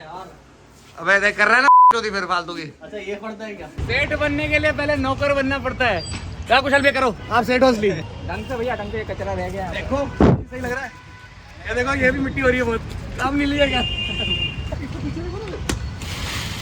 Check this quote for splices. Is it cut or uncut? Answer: cut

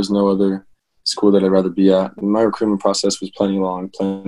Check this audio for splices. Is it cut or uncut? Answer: uncut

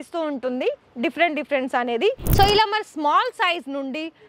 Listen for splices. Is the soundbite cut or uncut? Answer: cut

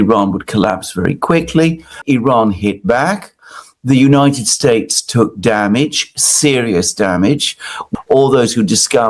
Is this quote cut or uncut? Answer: cut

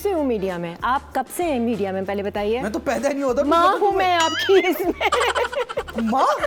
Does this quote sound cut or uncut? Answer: uncut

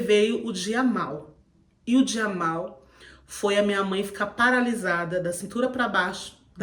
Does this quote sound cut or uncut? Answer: uncut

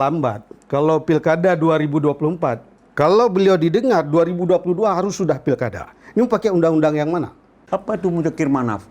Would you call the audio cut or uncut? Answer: cut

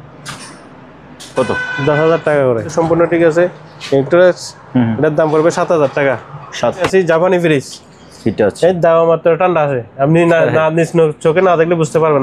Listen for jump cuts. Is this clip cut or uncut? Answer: cut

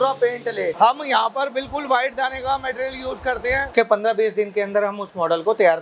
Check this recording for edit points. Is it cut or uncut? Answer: cut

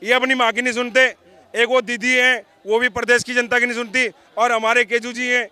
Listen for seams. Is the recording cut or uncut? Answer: uncut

